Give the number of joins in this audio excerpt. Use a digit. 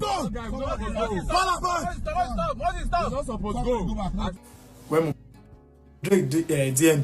1